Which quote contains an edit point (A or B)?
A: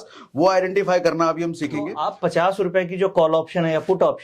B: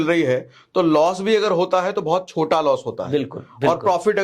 A